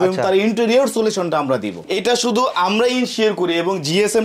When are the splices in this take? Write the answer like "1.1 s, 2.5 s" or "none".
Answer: 1.8 s